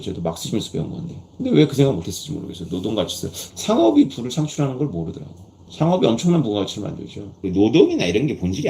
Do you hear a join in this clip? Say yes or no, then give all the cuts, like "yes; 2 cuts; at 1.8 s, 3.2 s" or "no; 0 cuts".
yes; 2 cuts; at 3.4 s, 7.4 s